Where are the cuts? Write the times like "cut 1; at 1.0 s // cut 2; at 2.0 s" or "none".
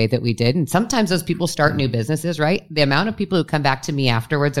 none